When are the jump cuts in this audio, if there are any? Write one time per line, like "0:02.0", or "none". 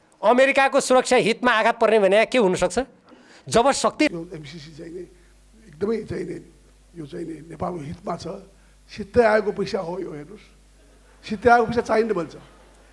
0:04.1